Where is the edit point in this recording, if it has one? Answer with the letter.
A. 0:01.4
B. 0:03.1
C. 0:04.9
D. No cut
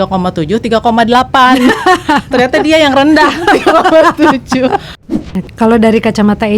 C